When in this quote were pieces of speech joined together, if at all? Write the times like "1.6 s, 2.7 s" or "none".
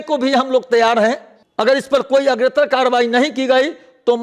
none